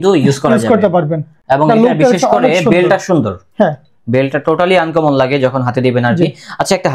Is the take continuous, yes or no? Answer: yes